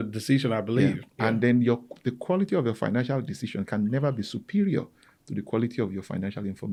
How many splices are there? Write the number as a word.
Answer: zero